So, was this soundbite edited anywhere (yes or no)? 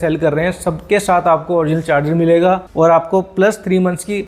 no